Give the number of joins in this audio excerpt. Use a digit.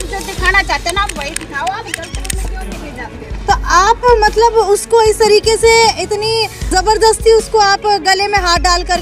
0